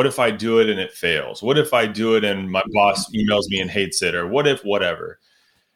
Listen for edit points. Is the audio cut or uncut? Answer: uncut